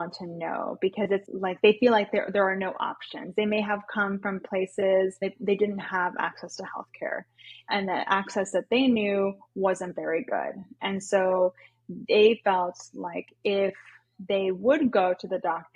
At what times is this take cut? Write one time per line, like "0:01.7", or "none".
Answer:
0:01.3
0:05.5